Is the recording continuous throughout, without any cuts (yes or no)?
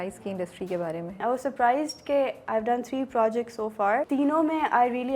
no